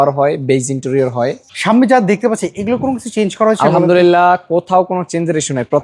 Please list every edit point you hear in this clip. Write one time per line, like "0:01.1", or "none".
0:01.5

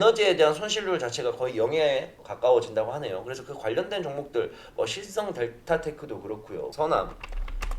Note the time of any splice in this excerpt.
0:06.7

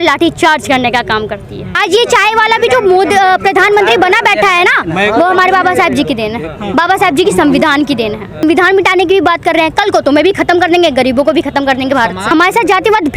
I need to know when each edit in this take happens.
0:01.7
0:08.4
0:12.3

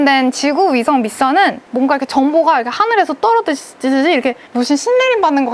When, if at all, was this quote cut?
0:01.6
0:04.5

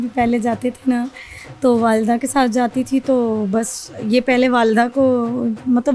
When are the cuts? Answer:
none

